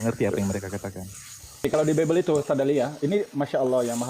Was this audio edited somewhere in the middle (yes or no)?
yes